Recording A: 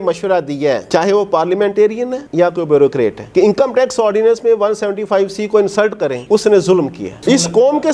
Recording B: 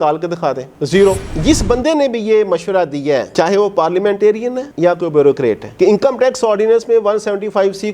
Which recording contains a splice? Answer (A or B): B